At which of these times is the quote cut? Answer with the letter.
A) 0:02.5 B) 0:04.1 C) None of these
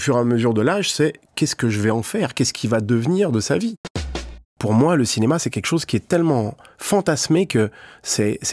B